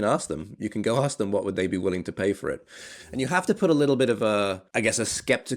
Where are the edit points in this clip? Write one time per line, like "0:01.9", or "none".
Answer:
0:04.6